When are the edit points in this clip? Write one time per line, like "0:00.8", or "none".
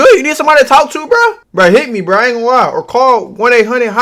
0:01.4